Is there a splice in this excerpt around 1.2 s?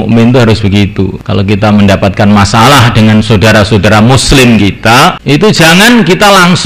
yes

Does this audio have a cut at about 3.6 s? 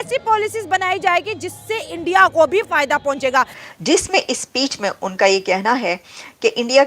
yes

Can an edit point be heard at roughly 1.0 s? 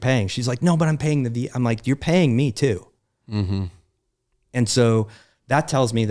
no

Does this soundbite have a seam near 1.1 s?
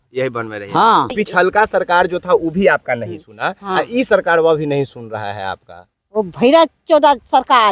yes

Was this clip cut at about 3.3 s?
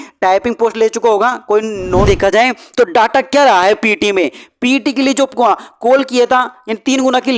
no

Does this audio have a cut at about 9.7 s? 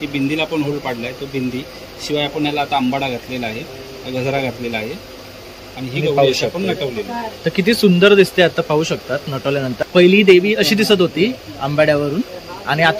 yes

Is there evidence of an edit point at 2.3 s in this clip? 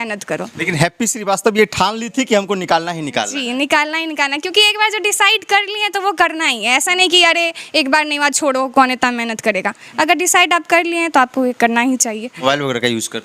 no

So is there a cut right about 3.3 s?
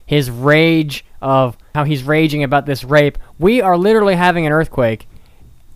no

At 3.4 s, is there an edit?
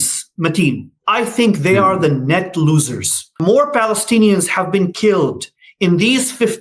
yes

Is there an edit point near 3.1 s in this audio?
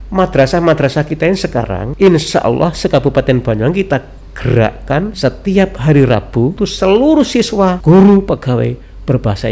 no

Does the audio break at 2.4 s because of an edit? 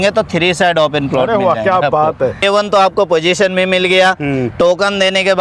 yes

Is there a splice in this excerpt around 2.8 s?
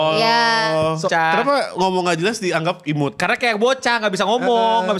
no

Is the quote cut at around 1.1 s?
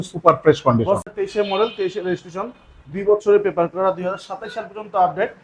yes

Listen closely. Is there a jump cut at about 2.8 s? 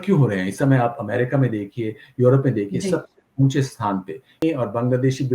no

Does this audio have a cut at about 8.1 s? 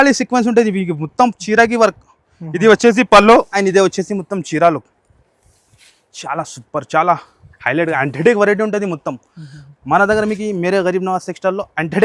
no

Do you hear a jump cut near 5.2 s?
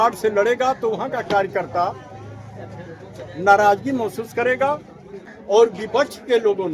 yes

